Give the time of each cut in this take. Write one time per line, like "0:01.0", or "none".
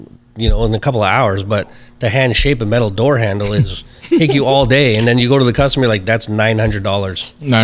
none